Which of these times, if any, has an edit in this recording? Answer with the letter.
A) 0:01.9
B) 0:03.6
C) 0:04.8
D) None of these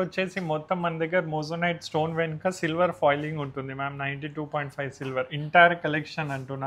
D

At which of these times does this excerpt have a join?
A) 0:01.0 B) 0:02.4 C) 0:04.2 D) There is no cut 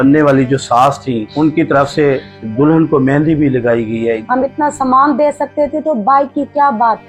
C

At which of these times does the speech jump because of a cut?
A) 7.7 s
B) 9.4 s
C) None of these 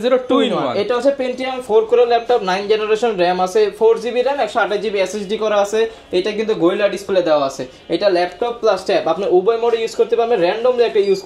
C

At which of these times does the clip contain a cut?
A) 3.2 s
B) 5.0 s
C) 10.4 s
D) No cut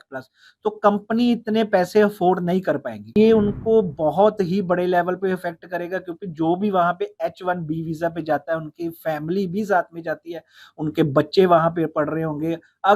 A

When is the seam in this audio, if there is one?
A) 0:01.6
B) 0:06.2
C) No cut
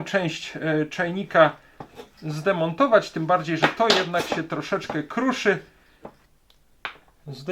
B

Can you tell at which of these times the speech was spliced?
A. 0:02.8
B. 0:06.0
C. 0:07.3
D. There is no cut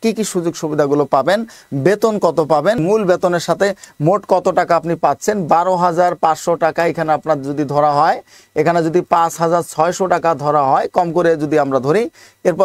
A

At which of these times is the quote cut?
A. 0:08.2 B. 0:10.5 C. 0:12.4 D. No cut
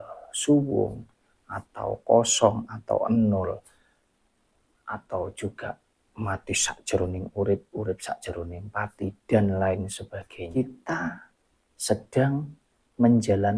B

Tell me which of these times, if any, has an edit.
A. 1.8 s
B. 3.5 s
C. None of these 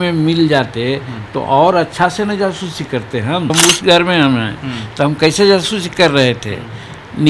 B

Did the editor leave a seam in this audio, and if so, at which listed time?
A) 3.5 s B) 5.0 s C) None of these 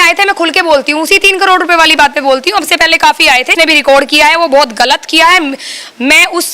A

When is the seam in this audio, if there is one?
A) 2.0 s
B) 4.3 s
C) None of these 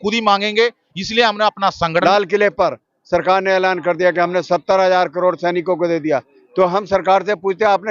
A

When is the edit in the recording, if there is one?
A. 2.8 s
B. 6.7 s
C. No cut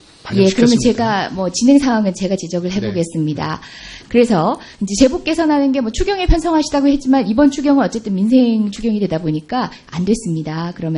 B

